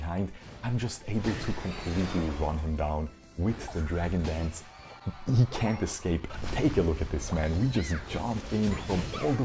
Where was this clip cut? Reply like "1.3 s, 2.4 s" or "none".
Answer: 6.3 s